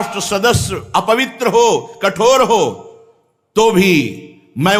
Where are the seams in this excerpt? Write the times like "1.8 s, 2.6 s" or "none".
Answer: none